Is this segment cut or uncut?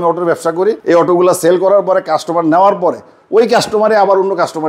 uncut